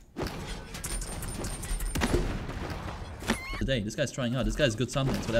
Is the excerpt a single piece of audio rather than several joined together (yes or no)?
no